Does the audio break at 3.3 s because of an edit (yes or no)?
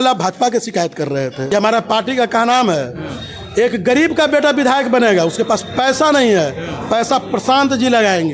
no